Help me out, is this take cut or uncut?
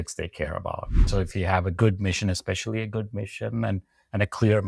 cut